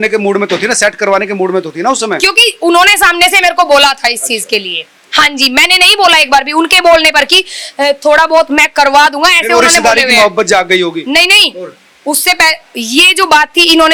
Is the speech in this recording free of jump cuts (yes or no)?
yes